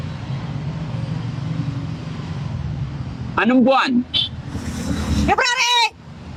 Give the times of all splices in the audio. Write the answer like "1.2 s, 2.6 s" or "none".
none